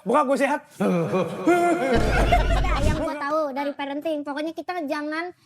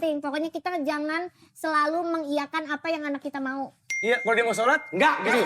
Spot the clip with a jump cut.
first; 1 cut; at 2.8 s

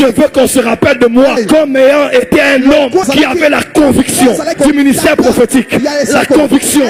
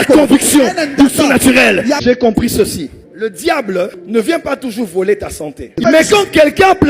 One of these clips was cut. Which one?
second; 2 cuts; at 2.0 s, 5.8 s

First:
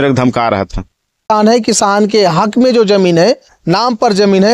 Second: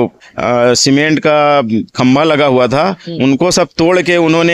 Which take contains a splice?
first; 1 cut; at 1.3 s

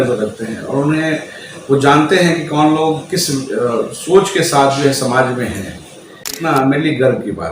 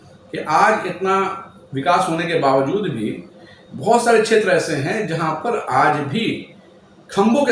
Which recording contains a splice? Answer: first; 1 cut; at 6.3 s

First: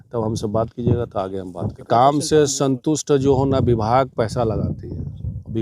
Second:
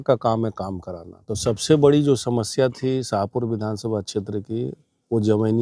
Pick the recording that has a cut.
first; 1 cut; at 1.9 s

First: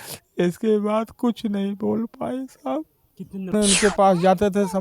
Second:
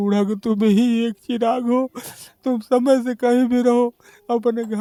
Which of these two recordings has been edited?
first; 1 cut; at 3.5 s

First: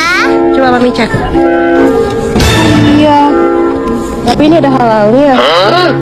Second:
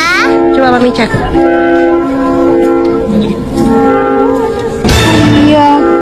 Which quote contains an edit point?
first; 2 cuts; at 1.8 s, 4.3 s

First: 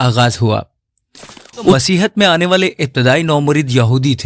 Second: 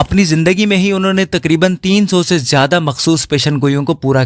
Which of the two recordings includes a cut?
first; 1 cut; at 1.7 s

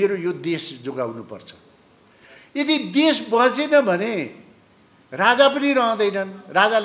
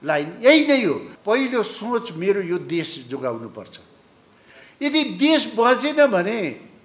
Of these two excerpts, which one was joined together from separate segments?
second; 1 cut; at 1.1 s

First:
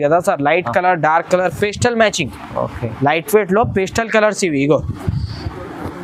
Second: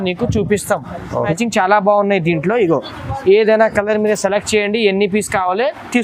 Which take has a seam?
second; 1 cut; at 1.3 s

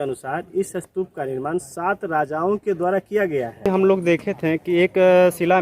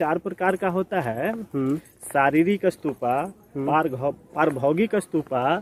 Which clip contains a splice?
first; 1 cut; at 3.7 s

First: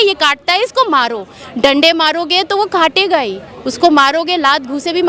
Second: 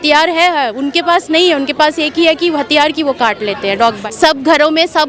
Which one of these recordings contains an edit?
second; 1 cut; at 4.0 s

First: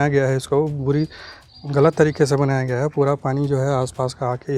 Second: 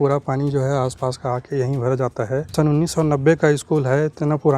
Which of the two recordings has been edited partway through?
second; 1 cut; at 2.5 s

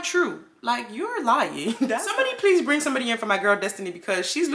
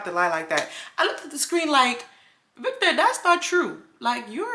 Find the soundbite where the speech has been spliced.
first; 1 cut; at 2.1 s

